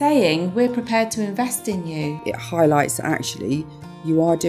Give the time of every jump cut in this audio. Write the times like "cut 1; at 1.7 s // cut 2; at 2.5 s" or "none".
cut 1; at 2.2 s